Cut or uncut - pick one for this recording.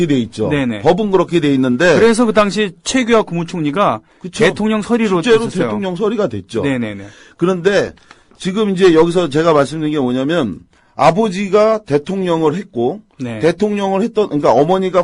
cut